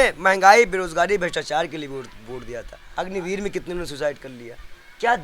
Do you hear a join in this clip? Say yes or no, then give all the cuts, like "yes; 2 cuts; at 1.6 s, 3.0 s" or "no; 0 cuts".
yes; 1 cut; at 2.8 s